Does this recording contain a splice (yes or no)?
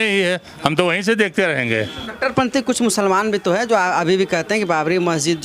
yes